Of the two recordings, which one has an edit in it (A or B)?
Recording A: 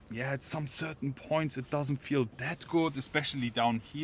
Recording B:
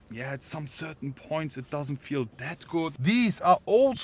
B